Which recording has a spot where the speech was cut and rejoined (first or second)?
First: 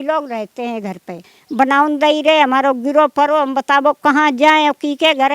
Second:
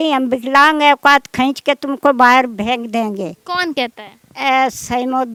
first